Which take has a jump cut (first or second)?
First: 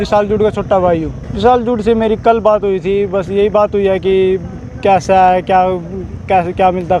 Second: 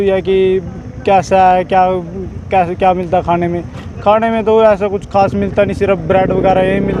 first